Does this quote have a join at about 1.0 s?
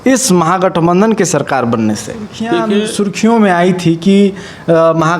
no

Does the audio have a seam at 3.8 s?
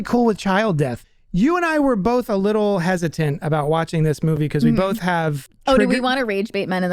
no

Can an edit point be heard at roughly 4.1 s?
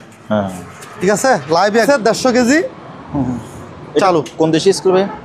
no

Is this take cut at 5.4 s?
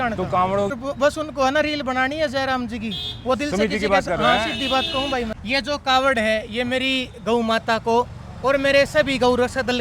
yes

